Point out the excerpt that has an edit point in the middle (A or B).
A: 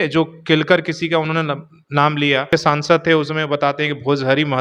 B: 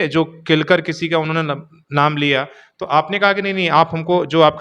A